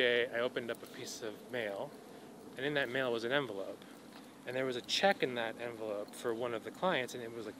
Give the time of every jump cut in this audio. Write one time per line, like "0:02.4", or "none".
none